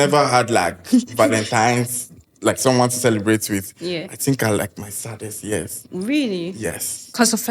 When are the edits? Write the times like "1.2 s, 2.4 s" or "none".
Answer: none